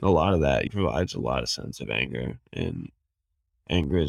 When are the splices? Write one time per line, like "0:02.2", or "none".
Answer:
none